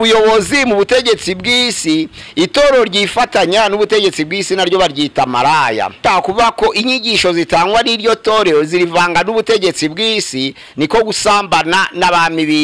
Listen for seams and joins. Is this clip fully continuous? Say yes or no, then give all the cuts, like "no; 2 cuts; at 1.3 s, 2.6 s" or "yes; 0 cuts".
no; 1 cut; at 6.0 s